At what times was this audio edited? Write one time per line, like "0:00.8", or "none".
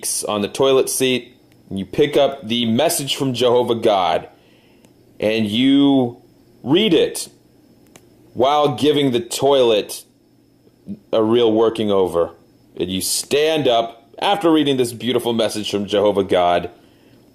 0:05.0